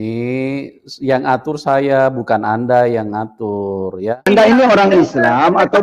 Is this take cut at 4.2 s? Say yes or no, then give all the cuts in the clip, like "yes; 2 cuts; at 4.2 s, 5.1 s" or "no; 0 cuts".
yes; 1 cut; at 4.2 s